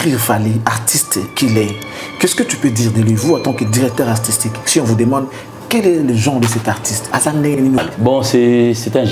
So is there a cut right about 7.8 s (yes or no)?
yes